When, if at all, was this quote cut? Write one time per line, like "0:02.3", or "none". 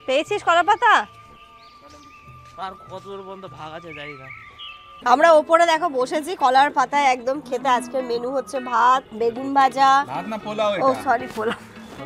0:05.0
0:09.1